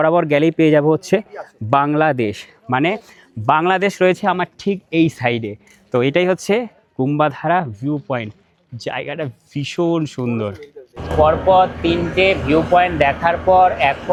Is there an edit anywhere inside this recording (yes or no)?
no